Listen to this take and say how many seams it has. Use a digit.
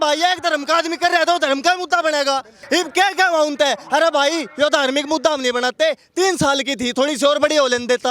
1